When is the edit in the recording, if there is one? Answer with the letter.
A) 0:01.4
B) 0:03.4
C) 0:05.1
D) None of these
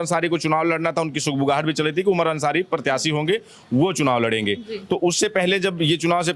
D